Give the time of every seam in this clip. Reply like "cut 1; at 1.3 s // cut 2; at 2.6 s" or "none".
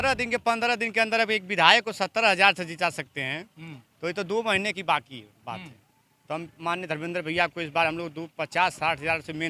none

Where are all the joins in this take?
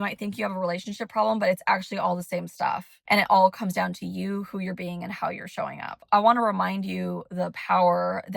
cut 1; at 2.9 s // cut 2; at 6.0 s

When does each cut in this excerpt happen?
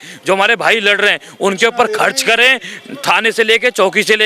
none

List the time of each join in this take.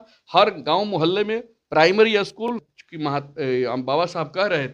cut 1; at 2.5 s

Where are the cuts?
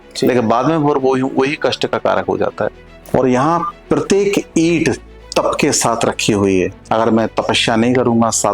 cut 1; at 2.9 s // cut 2; at 5.1 s

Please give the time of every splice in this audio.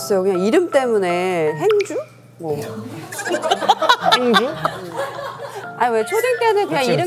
cut 1; at 5.6 s

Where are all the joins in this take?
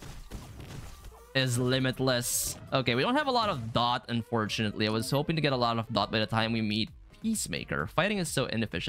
none

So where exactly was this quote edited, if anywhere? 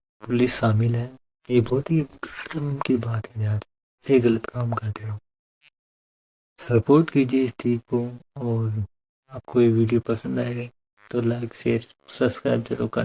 none

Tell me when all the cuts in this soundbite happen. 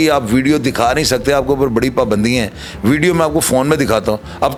none

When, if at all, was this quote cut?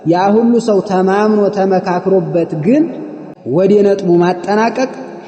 cut 1; at 3.6 s

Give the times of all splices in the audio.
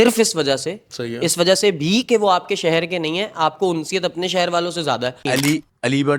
cut 1; at 5.2 s

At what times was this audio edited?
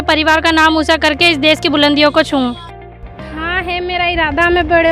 cut 1; at 2.8 s

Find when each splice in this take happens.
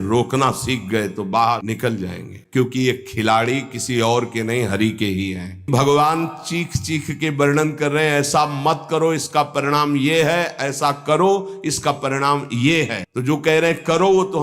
cut 1; at 2.2 s // cut 2; at 5.7 s // cut 3; at 13.1 s

